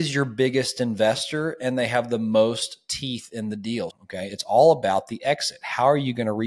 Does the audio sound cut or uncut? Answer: cut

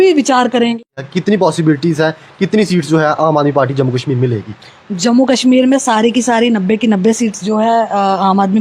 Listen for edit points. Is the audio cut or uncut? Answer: cut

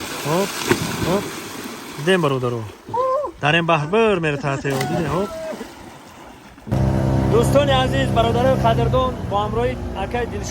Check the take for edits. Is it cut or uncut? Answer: uncut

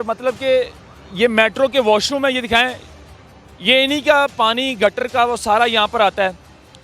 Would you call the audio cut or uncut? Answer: uncut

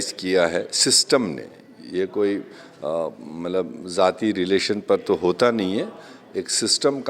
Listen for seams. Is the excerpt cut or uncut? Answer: uncut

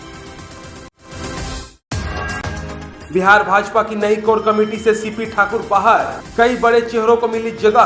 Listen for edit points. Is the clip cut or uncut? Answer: cut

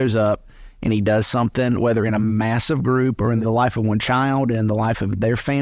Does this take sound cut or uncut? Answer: cut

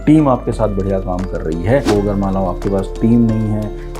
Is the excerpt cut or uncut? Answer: cut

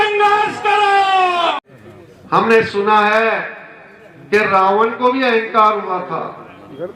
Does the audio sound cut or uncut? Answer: cut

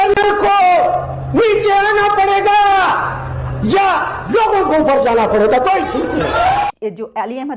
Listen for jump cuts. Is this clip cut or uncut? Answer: cut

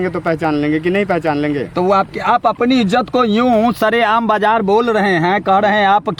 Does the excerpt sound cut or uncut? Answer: uncut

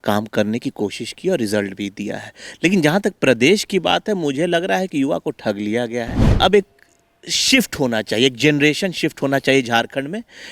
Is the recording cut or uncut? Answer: cut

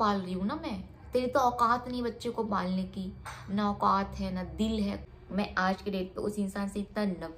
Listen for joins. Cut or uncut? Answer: cut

